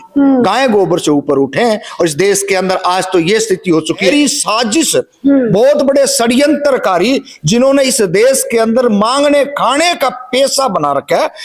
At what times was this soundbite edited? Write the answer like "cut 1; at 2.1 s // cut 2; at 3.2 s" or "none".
cut 1; at 4.1 s